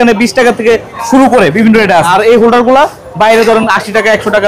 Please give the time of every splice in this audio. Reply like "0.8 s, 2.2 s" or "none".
2.1 s

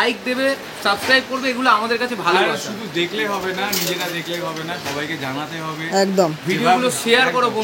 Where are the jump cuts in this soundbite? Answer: none

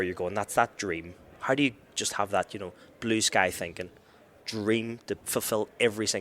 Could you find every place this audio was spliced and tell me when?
5.2 s

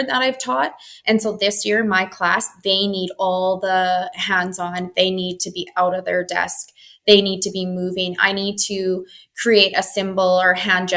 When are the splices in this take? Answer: none

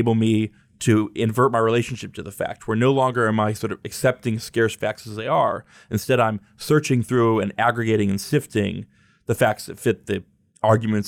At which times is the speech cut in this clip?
none

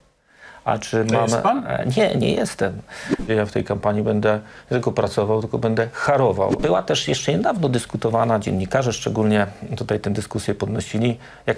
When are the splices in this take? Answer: 3.2 s, 6.6 s

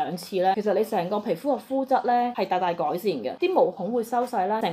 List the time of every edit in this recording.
none

